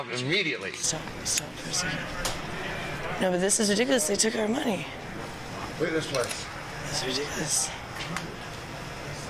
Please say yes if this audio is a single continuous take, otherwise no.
yes